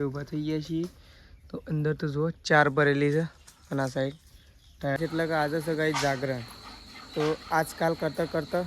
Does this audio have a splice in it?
yes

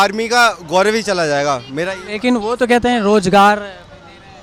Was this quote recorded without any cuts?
yes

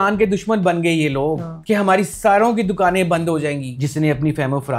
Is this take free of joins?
no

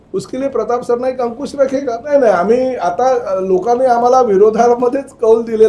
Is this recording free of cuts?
yes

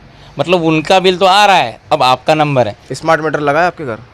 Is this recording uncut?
no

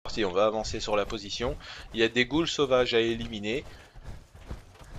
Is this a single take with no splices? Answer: no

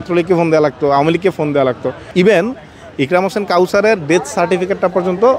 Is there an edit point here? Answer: yes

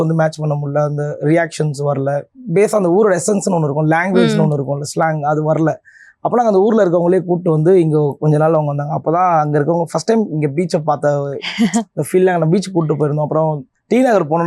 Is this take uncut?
yes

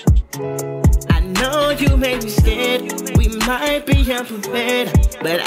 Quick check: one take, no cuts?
no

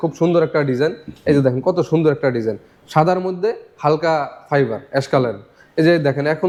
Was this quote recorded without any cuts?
yes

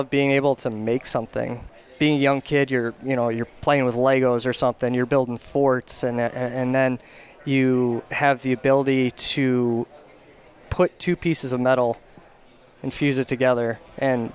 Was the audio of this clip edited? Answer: no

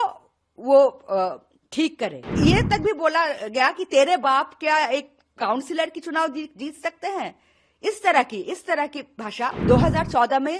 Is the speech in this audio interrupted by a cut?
yes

